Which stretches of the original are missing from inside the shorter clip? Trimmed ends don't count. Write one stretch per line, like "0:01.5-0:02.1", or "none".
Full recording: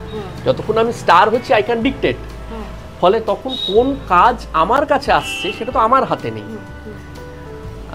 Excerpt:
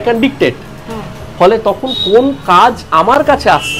none